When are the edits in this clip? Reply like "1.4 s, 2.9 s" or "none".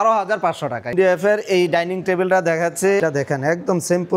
0.9 s, 3.0 s